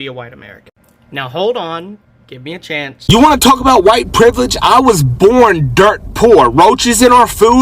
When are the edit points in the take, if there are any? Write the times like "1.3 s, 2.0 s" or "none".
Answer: 2.9 s

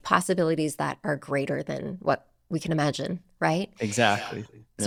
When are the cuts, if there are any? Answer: none

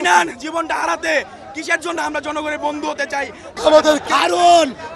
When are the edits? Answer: 4.0 s

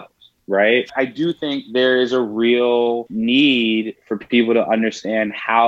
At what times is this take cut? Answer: 0.9 s, 3.1 s

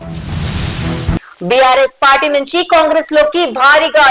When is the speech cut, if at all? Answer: 1.1 s

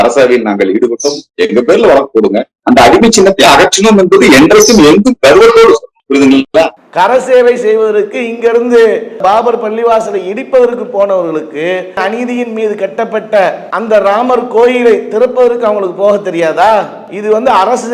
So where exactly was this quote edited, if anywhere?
2.6 s, 6.8 s

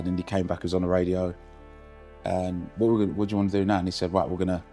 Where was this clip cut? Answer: none

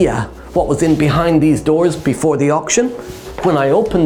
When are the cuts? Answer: none

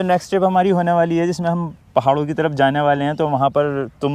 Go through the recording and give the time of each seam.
none

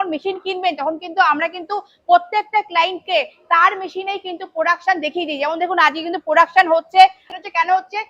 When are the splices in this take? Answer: 7.2 s

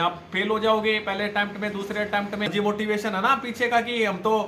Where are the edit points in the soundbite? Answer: 2.5 s

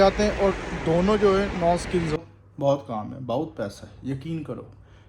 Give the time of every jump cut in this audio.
2.2 s

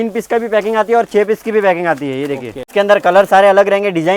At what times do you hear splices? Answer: 2.5 s

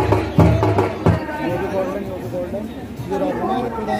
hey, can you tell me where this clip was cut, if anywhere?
1.1 s

